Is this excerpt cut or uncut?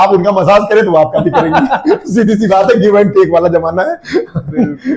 uncut